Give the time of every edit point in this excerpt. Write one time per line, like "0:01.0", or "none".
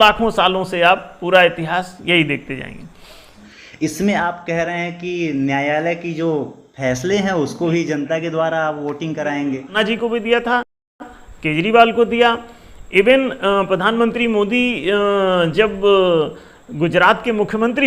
0:03.4
0:09.7